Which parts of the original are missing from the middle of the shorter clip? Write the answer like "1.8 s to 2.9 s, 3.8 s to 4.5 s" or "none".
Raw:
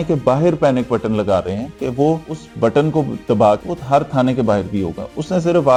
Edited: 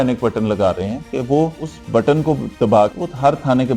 none